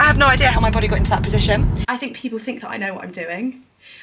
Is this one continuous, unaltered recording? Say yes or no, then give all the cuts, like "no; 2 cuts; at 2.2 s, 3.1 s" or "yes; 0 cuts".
no; 1 cut; at 1.8 s